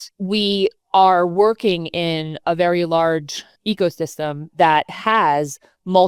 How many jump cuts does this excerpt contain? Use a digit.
0